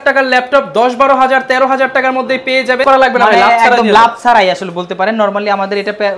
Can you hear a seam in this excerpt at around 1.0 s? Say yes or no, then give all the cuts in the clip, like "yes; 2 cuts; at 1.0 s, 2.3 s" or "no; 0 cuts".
no; 1 cut; at 2.8 s